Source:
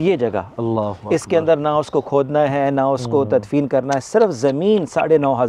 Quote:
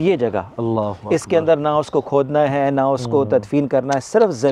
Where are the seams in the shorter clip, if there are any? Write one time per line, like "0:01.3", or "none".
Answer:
none